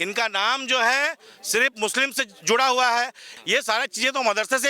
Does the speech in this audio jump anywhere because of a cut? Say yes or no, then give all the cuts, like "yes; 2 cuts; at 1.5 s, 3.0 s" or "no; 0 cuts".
yes; 1 cut; at 3.3 s